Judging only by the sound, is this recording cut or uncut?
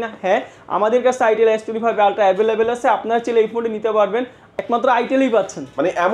cut